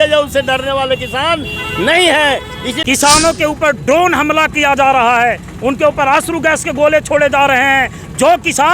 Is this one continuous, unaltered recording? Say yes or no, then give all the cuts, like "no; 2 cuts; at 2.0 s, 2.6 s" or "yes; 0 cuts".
no; 1 cut; at 2.7 s